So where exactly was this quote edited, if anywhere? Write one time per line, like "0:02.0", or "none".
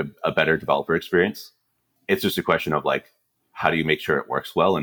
0:01.8